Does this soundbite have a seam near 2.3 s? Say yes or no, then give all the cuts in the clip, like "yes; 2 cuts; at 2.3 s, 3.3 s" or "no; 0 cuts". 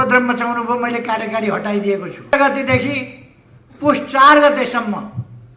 yes; 1 cut; at 2.3 s